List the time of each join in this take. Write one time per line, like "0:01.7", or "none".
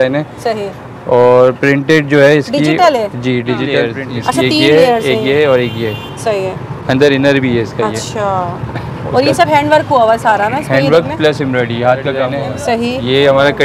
0:03.9
0:12.3